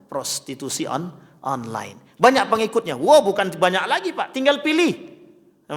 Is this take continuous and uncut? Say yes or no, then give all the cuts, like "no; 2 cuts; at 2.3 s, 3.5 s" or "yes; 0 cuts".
yes; 0 cuts